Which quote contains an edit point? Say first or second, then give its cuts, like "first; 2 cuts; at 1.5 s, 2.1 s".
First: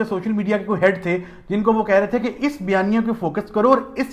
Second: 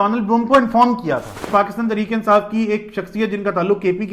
second; 1 cut; at 1.5 s